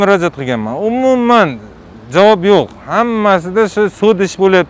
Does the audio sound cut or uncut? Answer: uncut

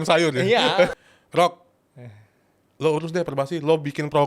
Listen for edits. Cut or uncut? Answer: cut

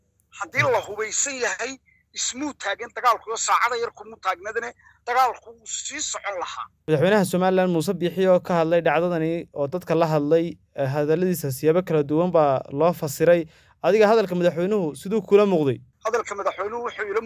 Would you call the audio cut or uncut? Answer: uncut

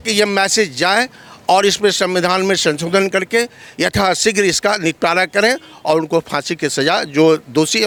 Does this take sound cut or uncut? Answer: uncut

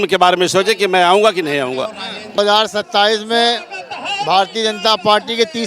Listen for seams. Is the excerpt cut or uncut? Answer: cut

